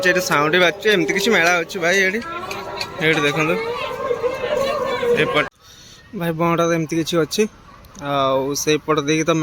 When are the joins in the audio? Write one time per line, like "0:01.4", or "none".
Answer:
0:05.5